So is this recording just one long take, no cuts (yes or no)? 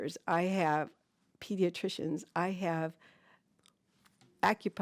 yes